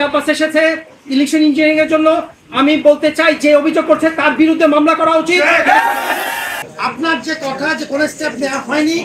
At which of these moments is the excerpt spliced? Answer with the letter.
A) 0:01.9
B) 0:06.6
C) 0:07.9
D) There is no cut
B